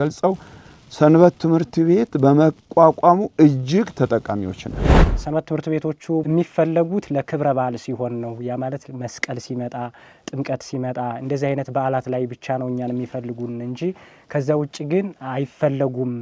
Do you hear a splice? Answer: yes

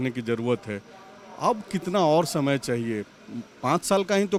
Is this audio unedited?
yes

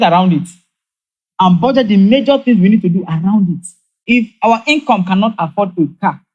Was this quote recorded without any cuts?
no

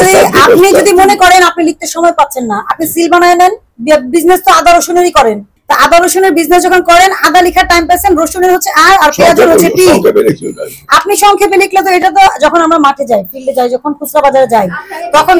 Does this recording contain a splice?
yes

